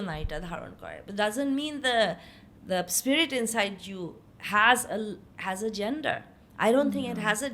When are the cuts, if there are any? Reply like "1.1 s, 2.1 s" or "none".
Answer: none

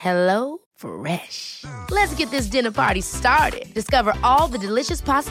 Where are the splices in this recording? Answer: none

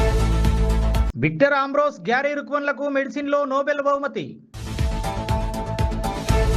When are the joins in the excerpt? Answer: none

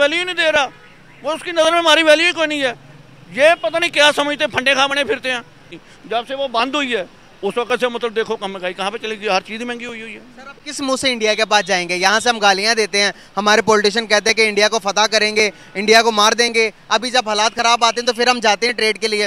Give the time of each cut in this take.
5.7 s

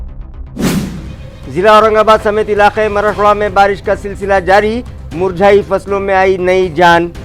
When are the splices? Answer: 1.0 s

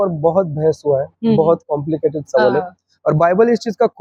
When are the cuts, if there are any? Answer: none

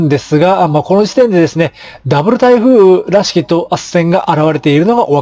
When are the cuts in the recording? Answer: none

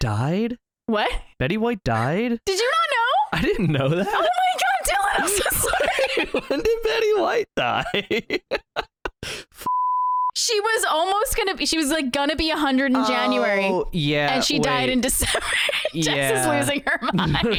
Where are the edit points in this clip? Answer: none

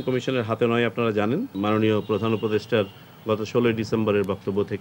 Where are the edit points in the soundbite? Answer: 1.5 s

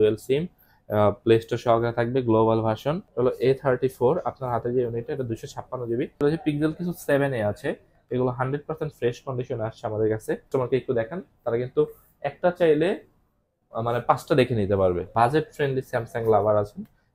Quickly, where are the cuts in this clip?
3.0 s, 6.2 s, 10.5 s, 15.1 s

